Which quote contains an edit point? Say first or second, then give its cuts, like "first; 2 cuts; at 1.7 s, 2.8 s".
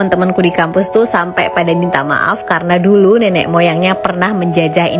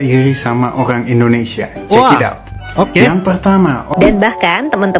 second; 1 cut; at 3.9 s